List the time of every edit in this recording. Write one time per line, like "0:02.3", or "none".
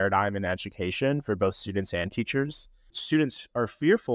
0:03.0